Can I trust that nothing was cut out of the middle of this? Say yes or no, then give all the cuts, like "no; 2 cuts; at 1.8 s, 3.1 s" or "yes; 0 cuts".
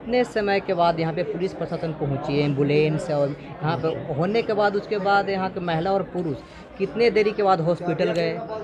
yes; 0 cuts